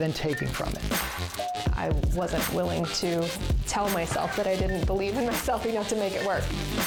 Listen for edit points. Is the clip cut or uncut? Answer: uncut